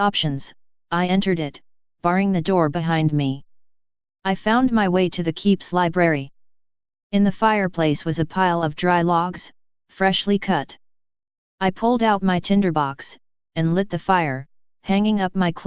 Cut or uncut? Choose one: uncut